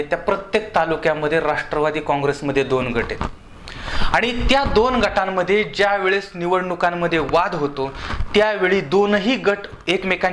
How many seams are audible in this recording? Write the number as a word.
zero